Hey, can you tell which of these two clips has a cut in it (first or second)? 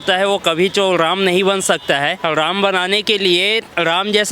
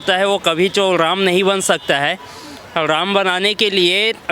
first